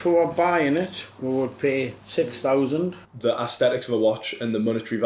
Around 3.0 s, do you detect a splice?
yes; 1 cut; at 3.0 s

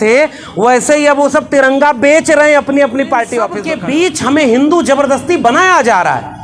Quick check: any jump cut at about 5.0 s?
no; 1 cut; at 3.7 s

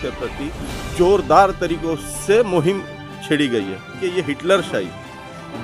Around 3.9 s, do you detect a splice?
yes; 1 cut; at 3.9 s

